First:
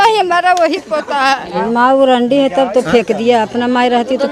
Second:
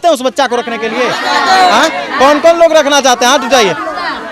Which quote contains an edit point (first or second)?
first